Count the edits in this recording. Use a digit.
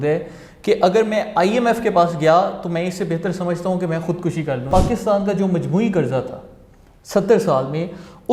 1